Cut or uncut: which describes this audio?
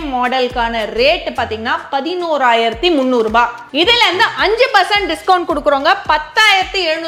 uncut